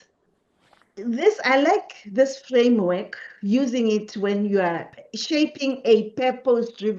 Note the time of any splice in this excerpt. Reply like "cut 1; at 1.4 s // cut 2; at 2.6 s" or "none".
cut 1; at 4.9 s